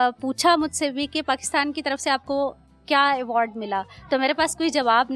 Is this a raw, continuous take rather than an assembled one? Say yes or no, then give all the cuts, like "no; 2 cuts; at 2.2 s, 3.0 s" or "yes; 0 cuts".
yes; 0 cuts